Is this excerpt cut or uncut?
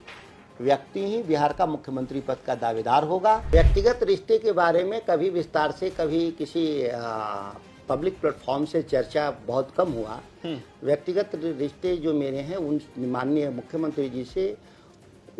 cut